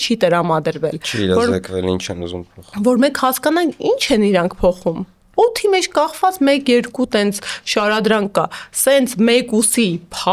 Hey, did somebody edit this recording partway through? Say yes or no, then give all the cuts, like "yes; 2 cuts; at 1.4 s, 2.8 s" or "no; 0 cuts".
no; 0 cuts